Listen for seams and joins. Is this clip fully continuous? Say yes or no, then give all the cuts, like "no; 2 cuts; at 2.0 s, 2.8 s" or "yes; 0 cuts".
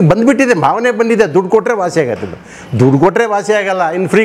yes; 0 cuts